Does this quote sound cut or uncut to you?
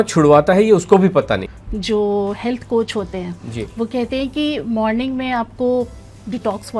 cut